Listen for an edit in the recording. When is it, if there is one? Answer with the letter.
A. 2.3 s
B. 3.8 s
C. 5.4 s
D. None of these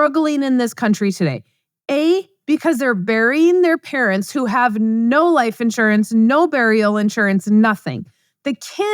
D